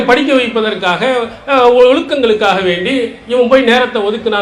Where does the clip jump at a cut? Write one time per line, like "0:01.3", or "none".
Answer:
none